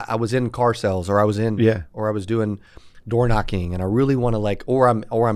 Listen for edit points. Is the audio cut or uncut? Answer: uncut